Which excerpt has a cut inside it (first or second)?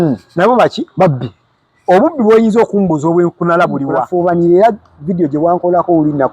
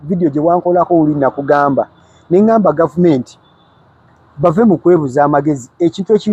first